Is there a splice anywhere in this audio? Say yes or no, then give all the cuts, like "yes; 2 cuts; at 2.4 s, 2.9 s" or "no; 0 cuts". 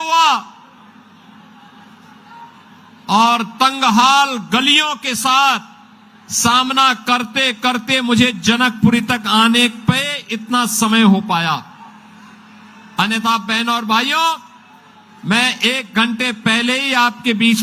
no; 0 cuts